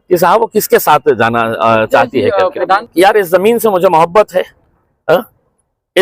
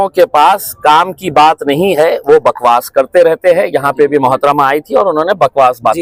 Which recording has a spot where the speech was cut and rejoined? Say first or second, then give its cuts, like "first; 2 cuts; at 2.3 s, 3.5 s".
first; 1 cut; at 2.8 s